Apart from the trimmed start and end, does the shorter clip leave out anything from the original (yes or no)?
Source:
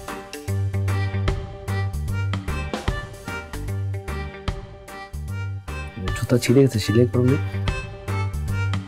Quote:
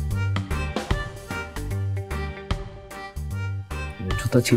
no